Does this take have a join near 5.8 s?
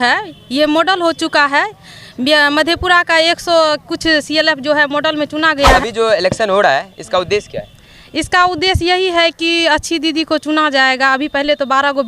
yes; 1 cut; at 5.8 s

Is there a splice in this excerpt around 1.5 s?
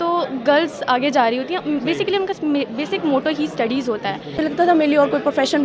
no; 1 cut; at 4.4 s

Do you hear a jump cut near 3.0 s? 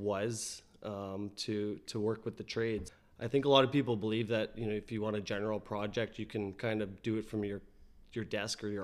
yes; 1 cut; at 3.0 s

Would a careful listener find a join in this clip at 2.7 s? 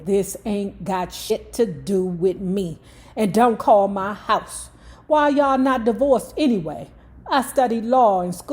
no; 1 cut; at 1.3 s

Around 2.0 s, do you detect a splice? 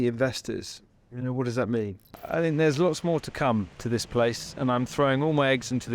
yes; 1 cut; at 2.0 s

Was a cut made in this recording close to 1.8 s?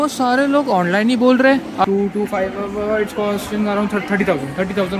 yes; 1 cut; at 1.8 s

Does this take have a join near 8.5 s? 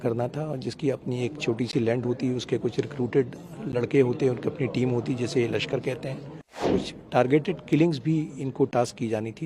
no; 1 cut; at 6.7 s

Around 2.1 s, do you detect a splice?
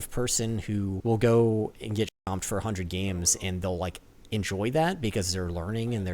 yes; 2 cuts; at 1.0 s, 2.1 s

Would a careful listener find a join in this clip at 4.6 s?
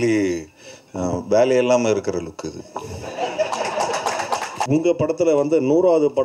yes; 1 cut; at 4.6 s

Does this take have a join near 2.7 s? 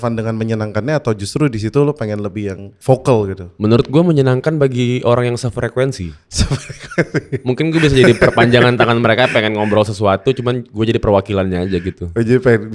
yes; 1 cut; at 2.7 s

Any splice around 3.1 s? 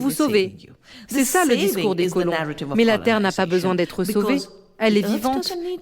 no; 2 cuts; at 1.1 s, 4.6 s

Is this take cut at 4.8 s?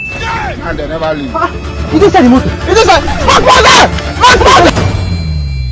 yes; 1 cut; at 4.8 s

